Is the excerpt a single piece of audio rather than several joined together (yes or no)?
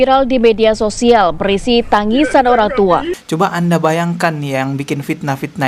no